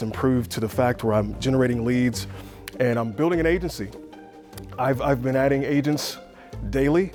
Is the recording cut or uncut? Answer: uncut